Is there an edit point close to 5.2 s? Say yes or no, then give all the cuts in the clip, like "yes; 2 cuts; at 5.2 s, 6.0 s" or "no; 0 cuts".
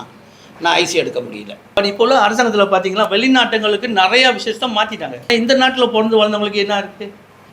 yes; 2 cuts; at 1.6 s, 5.2 s